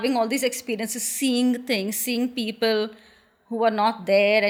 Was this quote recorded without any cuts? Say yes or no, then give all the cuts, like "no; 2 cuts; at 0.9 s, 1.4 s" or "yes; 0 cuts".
yes; 0 cuts